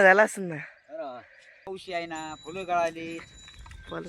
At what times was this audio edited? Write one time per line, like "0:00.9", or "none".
0:01.7